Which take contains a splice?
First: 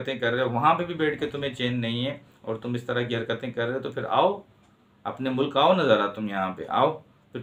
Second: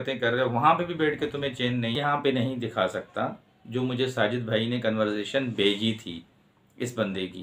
second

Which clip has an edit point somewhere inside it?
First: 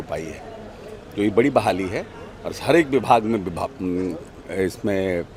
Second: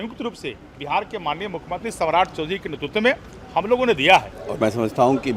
second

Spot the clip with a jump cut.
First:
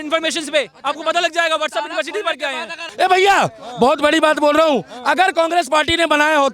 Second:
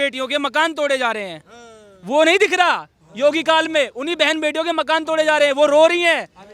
first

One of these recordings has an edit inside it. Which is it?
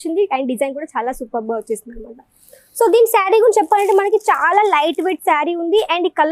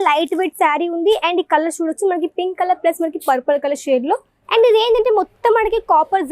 second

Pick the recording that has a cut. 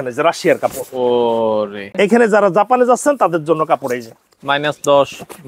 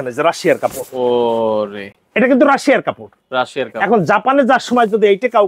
first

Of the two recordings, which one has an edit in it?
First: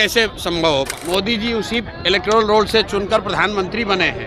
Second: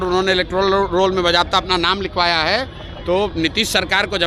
first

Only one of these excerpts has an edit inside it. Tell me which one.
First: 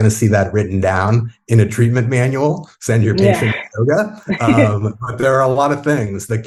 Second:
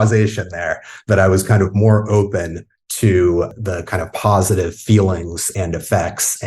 second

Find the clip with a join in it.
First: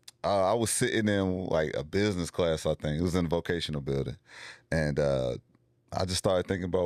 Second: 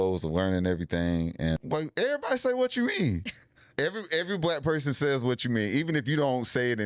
second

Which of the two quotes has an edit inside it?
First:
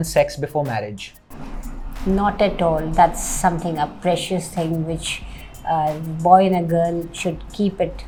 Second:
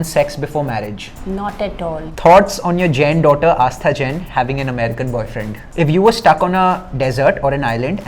second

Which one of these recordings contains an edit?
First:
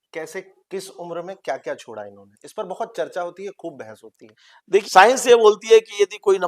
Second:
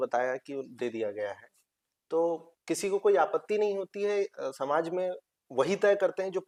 first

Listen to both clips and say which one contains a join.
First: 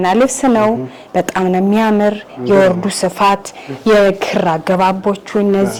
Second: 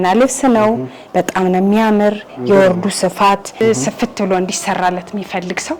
second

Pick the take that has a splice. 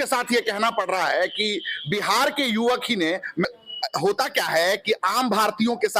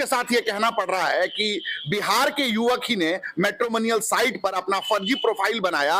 first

